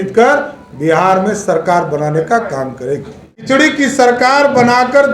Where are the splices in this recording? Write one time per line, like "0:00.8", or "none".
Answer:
0:03.4